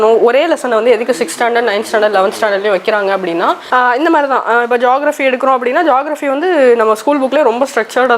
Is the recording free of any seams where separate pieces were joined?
no; 1 cut; at 3.7 s

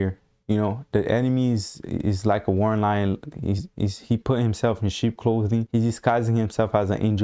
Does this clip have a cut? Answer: no; 0 cuts

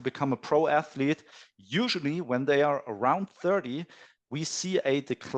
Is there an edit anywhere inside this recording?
yes; 1 cut; at 1.4 s

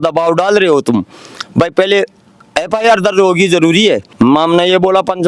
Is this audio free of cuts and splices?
no; 1 cut; at 4.1 s

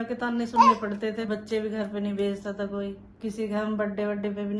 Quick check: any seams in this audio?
yes; 2 cuts; at 1.3 s, 3.0 s

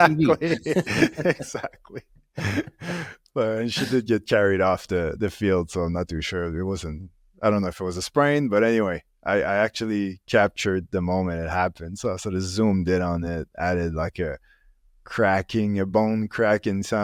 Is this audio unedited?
yes; 0 cuts

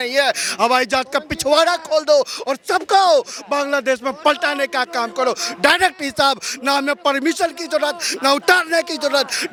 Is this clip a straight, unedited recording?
yes; 0 cuts

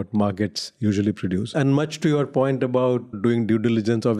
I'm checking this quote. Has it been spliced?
yes; 2 cuts; at 1.5 s, 3.2 s

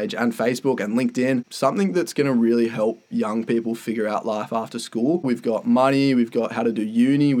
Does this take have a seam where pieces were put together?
yes; 2 cuts; at 1.5 s, 5.3 s

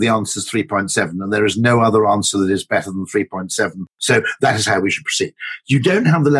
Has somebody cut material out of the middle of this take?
no; 0 cuts

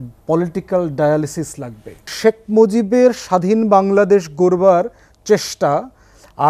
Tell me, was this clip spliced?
yes; 1 cut; at 2.1 s

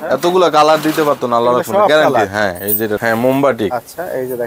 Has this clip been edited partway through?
yes; 1 cut; at 3.0 s

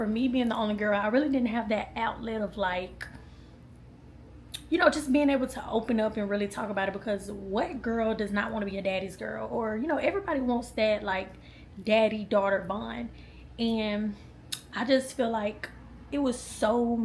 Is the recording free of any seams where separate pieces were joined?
yes; 0 cuts

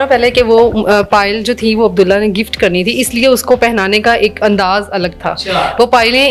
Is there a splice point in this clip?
no; 0 cuts

